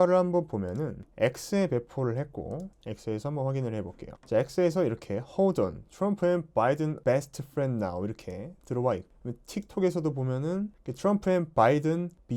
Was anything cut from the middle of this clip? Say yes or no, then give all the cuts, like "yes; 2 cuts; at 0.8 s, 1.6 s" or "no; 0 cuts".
yes; 1 cut; at 1.0 s